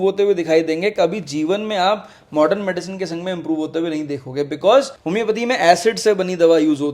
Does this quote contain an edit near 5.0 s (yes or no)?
yes